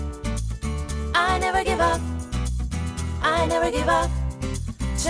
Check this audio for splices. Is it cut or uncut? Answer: uncut